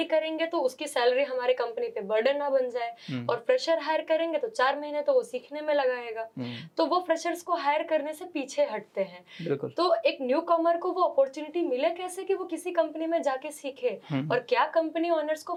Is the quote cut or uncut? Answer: uncut